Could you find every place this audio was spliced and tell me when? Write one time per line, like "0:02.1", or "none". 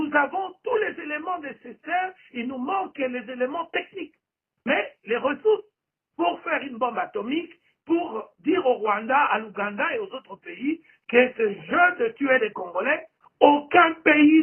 0:13.2